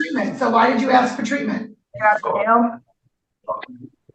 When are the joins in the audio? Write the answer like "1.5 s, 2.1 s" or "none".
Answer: 1.9 s